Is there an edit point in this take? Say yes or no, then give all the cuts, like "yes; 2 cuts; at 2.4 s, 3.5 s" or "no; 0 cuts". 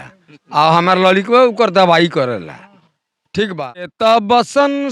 yes; 1 cut; at 3.9 s